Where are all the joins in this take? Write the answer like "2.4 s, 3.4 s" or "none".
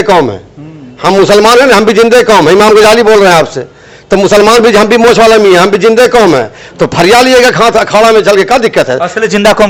none